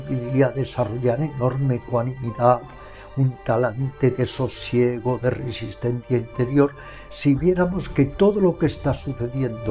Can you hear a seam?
no; 0 cuts

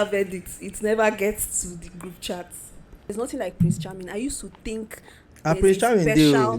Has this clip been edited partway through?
yes; 1 cut; at 3.1 s

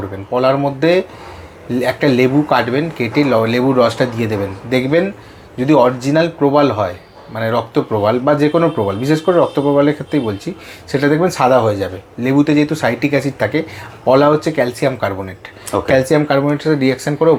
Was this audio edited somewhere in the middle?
no; 0 cuts

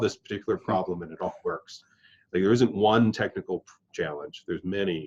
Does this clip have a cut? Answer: no; 0 cuts

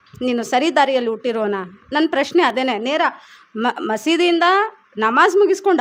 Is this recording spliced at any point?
no; 0 cuts

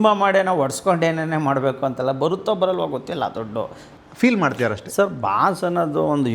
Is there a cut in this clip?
yes; 1 cut; at 3.8 s

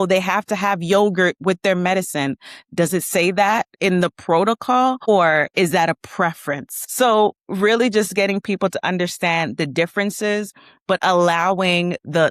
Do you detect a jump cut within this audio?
no; 0 cuts

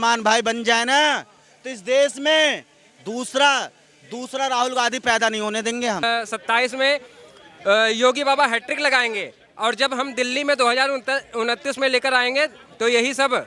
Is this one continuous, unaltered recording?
no; 1 cut; at 6.0 s

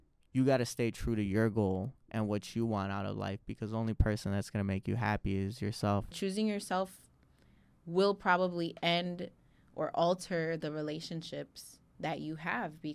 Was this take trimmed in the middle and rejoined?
yes; 1 cut; at 6.1 s

